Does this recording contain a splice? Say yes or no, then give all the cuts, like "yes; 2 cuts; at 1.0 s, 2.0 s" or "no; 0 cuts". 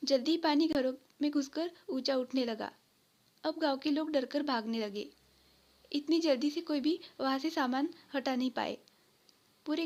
no; 0 cuts